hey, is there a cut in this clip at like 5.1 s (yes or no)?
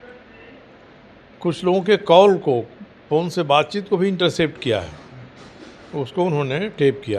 no